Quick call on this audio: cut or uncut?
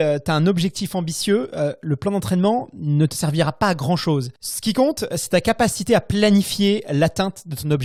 uncut